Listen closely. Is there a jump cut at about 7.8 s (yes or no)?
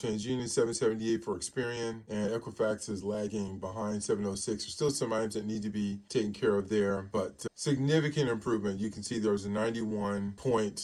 no